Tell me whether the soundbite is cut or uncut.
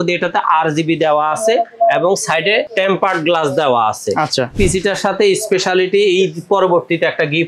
cut